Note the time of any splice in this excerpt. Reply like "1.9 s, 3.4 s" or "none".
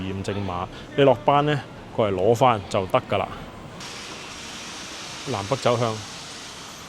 3.8 s